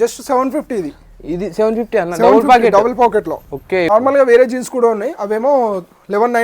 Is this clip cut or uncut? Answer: cut